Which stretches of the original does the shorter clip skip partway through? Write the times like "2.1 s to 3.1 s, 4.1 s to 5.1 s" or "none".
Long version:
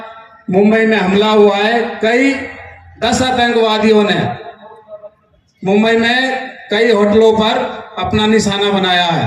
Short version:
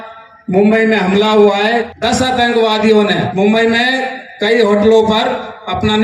1.9 s to 2.9 s, 4.3 s to 5.6 s